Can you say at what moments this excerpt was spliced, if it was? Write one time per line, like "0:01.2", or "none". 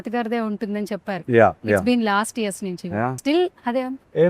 0:03.2